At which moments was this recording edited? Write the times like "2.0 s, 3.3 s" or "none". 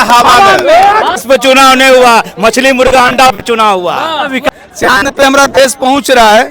1.2 s, 4.5 s